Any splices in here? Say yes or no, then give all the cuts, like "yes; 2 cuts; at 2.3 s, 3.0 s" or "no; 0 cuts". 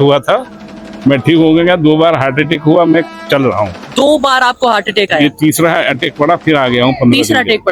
no; 0 cuts